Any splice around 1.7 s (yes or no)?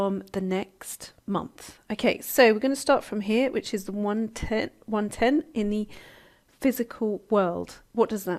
no